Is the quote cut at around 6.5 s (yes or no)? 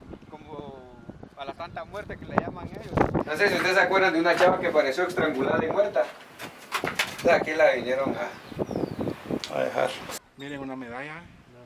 no